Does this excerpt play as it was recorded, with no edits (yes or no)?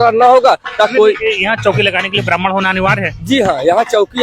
no